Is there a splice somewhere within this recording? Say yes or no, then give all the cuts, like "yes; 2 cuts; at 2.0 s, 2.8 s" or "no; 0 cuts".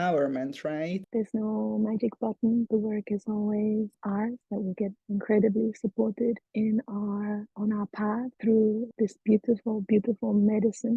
yes; 4 cuts; at 1.0 s, 2.7 s, 8.3 s, 8.9 s